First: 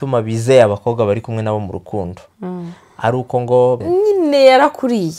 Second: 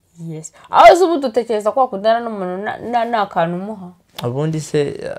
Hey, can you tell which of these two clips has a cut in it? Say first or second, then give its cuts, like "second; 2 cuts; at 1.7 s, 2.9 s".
first; 1 cut; at 3.8 s